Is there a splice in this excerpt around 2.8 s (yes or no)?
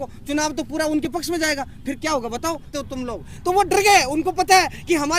yes